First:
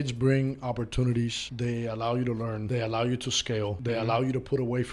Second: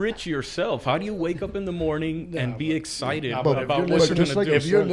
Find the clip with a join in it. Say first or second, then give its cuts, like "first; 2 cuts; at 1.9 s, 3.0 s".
first; 3 cuts; at 1.4 s, 2.6 s, 3.8 s